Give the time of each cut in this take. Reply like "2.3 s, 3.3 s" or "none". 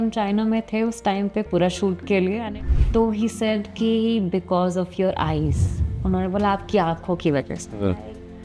2.4 s